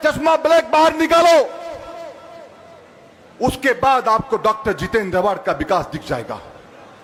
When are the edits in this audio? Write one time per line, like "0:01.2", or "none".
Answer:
none